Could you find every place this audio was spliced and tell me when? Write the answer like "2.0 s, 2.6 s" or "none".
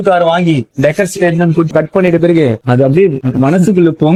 none